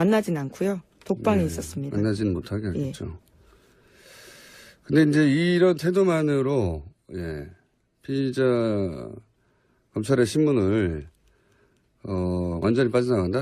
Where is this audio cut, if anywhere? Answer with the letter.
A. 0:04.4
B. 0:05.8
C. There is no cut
B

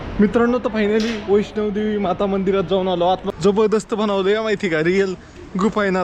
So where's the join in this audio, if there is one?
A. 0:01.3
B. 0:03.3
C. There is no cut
B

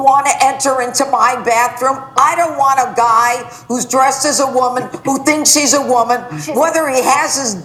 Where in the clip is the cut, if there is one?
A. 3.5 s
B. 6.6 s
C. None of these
C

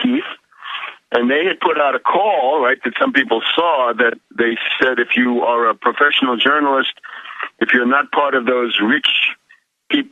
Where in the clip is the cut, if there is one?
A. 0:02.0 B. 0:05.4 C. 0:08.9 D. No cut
C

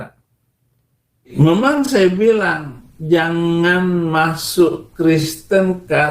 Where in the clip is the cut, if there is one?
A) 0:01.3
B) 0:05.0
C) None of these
A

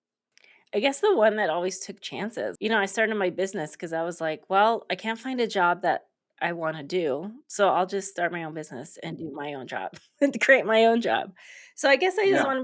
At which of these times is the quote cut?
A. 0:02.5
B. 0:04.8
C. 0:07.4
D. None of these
A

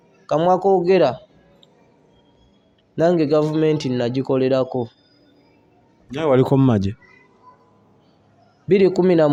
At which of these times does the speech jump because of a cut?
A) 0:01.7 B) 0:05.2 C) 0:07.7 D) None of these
D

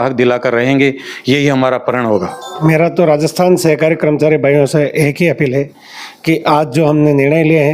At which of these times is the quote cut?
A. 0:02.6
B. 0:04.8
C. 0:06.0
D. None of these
A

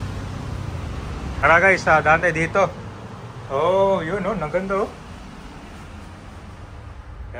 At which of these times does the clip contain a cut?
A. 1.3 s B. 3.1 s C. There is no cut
A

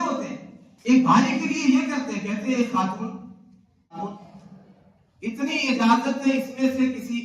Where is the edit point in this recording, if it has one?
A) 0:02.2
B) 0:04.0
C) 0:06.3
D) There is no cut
B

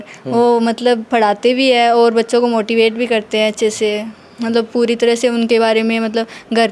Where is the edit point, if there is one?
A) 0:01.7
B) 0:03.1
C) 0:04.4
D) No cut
D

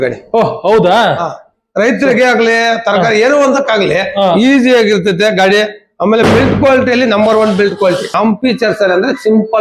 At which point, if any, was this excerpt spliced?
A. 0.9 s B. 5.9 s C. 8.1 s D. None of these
C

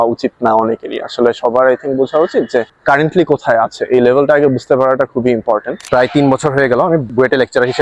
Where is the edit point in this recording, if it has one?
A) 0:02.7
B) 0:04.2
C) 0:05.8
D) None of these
C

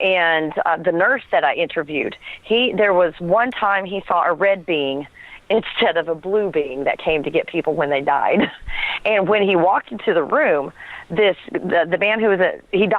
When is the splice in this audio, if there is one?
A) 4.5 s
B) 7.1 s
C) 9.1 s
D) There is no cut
A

